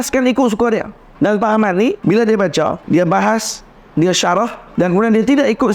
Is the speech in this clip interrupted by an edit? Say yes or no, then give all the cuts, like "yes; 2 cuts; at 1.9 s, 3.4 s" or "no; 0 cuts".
yes; 4 cuts; at 1.0 s, 2.0 s, 2.8 s, 4.6 s